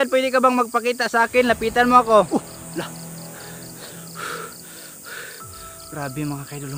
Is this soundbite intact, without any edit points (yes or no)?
no